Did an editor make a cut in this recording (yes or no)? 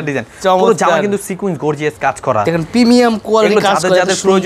no